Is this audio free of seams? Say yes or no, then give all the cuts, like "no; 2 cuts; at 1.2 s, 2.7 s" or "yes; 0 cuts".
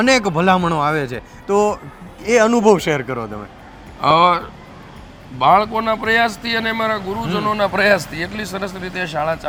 yes; 0 cuts